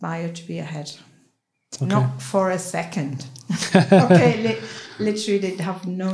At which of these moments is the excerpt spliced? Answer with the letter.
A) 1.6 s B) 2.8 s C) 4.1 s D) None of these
D